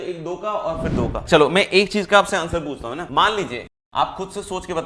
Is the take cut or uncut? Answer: cut